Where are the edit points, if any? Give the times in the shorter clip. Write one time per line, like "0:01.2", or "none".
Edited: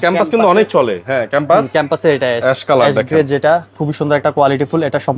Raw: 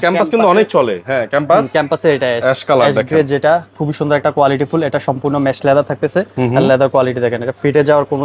none